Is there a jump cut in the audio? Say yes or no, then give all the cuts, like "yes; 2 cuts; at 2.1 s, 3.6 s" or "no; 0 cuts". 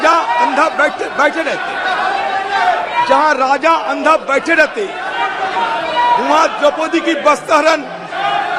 no; 0 cuts